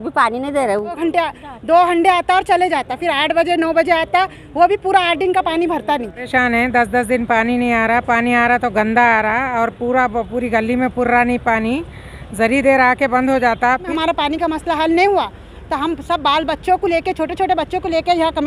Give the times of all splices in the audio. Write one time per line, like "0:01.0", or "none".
0:01.0
0:06.2
0:13.9